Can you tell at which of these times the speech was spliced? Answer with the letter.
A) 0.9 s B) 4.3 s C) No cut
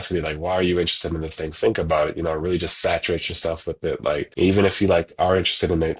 B